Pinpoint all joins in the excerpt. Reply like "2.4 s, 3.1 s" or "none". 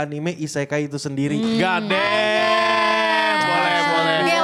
none